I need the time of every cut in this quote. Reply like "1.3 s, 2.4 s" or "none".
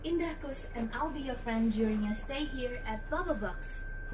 none